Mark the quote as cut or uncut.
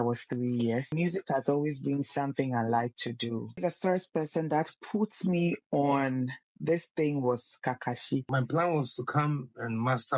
cut